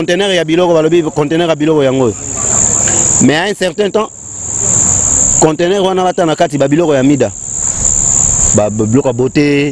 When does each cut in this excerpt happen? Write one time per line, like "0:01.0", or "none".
none